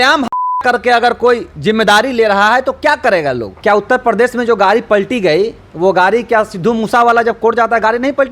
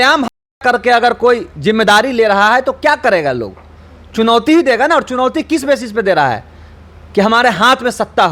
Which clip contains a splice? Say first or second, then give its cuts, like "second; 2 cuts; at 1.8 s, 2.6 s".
first; 1 cut; at 3.5 s